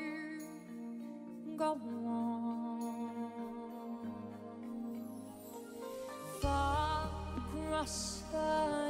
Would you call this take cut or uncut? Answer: uncut